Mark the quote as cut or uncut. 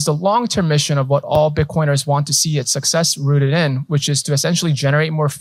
uncut